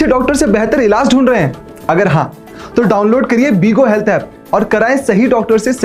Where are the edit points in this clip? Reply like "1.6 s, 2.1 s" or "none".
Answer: none

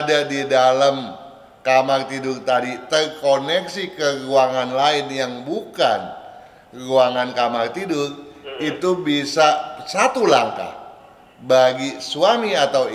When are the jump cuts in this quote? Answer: none

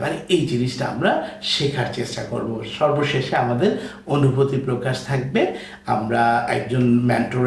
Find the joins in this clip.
none

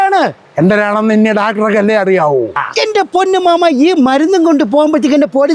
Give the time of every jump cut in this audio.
2.7 s

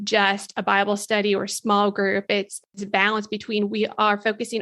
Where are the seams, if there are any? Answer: 2.7 s

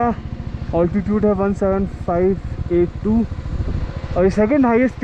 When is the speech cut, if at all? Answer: none

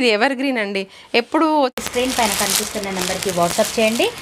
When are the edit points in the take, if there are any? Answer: 1.8 s

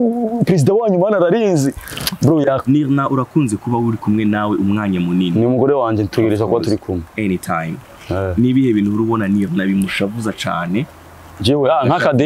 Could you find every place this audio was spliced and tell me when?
2.6 s

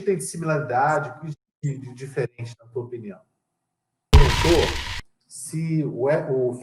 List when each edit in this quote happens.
4.1 s

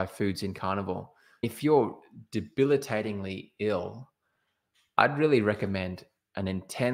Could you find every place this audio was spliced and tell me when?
1.5 s

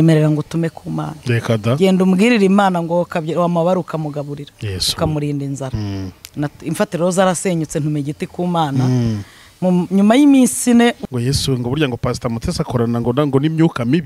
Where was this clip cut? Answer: 11.0 s

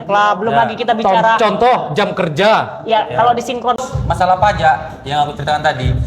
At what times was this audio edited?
3.8 s

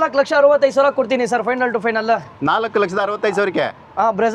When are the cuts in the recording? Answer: none

